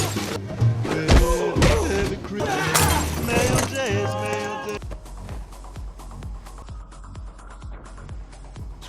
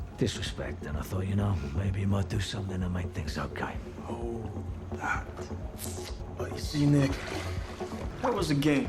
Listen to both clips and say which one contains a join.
first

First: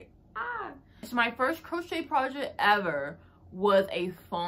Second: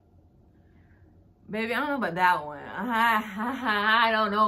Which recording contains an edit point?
first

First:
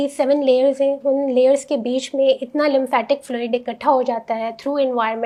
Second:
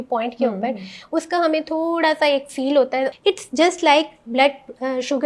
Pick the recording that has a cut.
second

